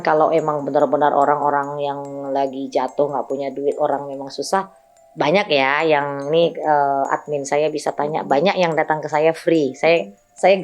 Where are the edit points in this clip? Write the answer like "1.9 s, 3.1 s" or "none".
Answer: none